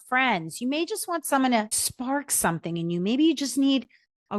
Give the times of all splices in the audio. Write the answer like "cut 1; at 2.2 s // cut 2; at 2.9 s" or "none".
cut 1; at 1.8 s